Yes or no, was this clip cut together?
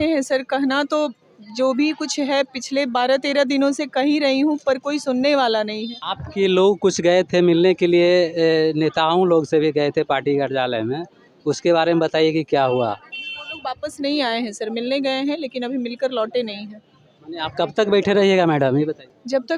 no